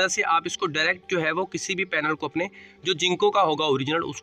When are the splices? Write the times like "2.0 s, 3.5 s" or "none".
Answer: none